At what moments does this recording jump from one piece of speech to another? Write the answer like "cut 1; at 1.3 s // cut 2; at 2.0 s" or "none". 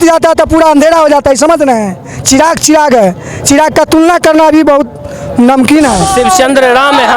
cut 1; at 6.1 s